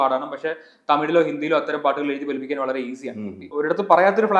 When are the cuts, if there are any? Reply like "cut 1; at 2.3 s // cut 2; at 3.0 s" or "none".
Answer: cut 1; at 3.5 s